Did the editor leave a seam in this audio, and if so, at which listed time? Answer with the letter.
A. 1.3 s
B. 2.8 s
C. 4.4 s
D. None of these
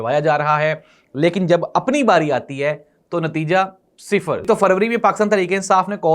C